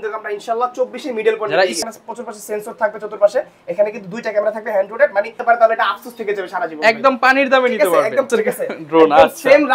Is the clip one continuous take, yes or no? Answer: no